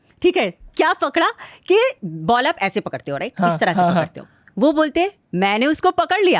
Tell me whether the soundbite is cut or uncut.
cut